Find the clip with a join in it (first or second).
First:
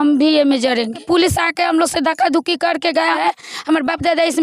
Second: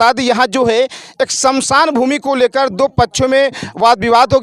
first